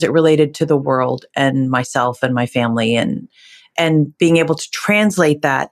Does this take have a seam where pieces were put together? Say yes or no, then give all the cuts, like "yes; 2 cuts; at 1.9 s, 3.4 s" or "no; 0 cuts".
no; 0 cuts